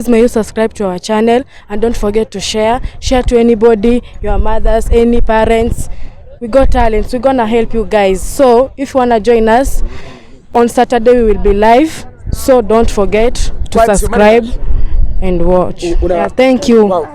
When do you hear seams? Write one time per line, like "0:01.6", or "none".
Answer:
0:10.4
0:16.2

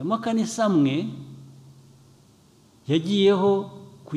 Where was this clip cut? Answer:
none

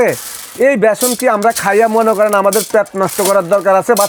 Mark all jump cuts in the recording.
none

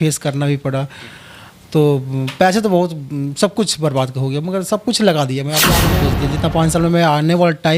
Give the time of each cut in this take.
0:05.9

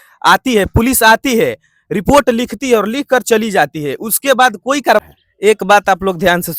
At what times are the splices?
0:05.0

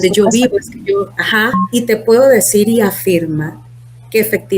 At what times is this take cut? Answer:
0:01.6

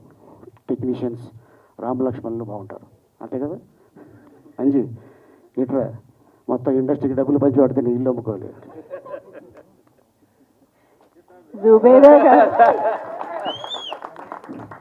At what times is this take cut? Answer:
0:04.5

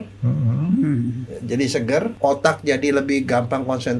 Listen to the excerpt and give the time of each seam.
0:02.1

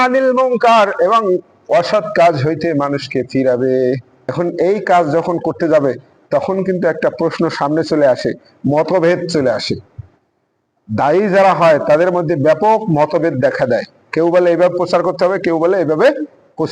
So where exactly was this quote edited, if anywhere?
0:04.2

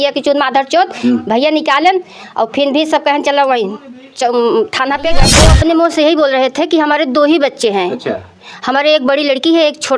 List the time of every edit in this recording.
0:05.3

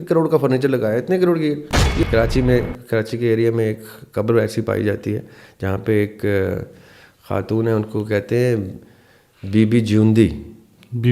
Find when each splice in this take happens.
0:02.0

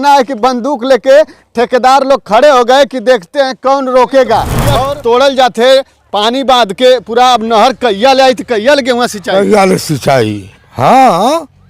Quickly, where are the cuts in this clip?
0:04.7

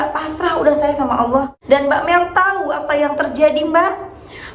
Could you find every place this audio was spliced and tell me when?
0:01.6

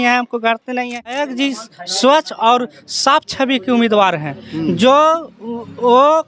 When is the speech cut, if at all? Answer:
0:01.2

